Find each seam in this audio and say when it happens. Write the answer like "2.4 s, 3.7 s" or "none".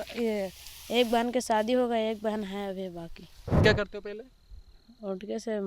3.6 s

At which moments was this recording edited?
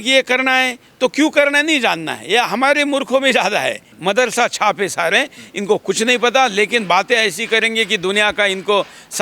3.9 s

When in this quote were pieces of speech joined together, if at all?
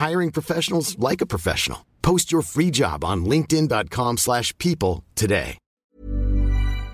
5.8 s

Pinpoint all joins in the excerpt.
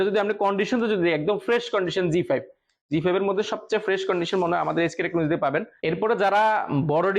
5.7 s

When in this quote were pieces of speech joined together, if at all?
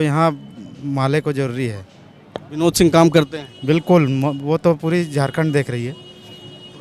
none

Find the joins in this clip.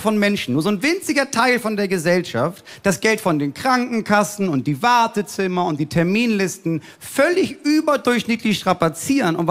none

